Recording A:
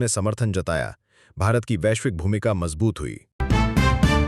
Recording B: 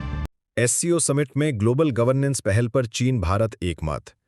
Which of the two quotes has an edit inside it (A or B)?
A